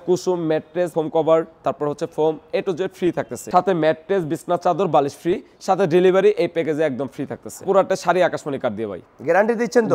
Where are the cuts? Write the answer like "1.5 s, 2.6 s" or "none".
0.9 s, 3.4 s, 7.6 s